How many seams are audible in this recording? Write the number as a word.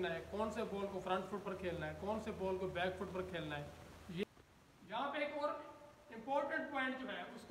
one